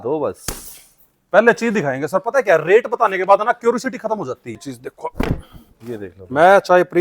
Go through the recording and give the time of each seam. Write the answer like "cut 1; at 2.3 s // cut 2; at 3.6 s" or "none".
cut 1; at 4.6 s